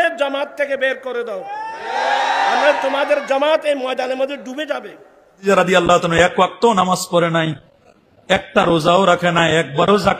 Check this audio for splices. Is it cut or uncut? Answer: cut